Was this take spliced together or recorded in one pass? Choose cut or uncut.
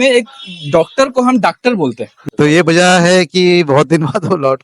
cut